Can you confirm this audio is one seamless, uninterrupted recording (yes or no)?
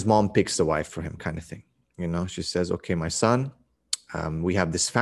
yes